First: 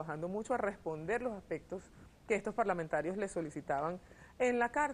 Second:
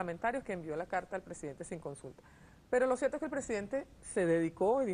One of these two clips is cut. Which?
second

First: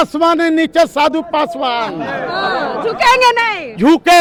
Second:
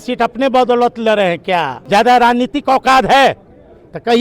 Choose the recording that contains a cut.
second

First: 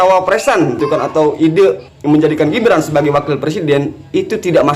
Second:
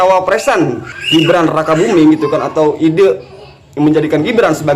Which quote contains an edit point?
first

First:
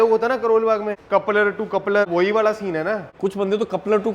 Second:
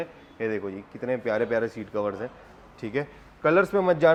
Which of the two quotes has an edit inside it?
first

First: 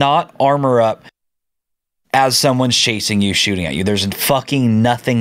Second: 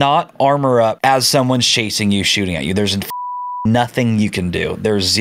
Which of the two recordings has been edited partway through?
second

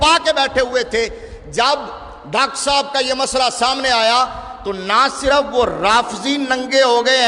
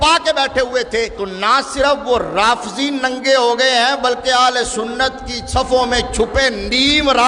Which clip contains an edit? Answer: second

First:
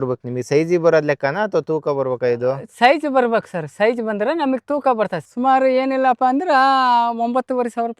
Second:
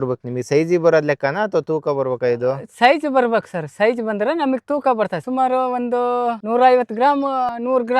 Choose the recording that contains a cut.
first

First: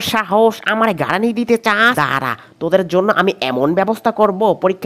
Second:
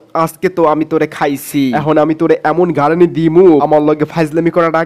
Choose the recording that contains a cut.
first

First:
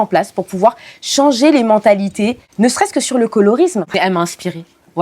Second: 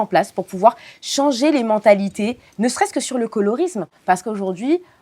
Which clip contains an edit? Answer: first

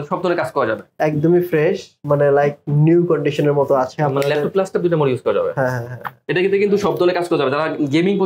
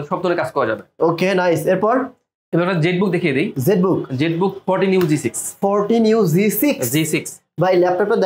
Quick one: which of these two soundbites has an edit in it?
first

